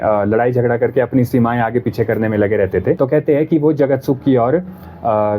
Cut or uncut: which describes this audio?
cut